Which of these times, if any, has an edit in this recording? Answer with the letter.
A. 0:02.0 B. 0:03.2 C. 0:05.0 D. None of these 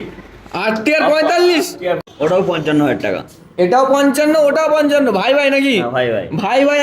A